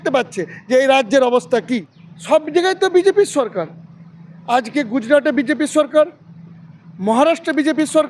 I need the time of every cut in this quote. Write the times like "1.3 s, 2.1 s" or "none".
1.6 s